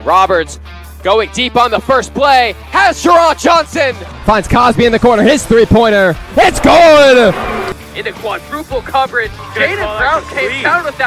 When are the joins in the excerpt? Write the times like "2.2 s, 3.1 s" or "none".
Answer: 4.1 s, 7.8 s